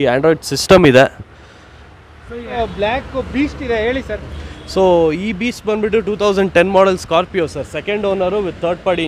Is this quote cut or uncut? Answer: cut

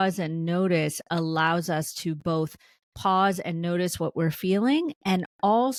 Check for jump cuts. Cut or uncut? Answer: uncut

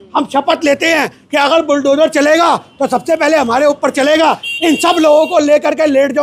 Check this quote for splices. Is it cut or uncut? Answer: uncut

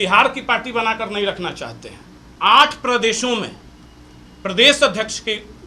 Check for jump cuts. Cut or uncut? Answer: cut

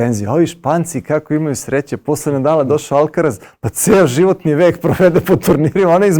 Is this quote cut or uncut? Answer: uncut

